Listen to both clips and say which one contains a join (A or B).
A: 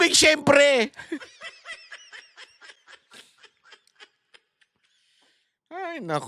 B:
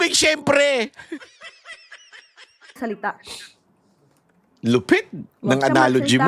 B